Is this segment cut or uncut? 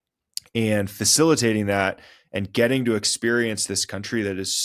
uncut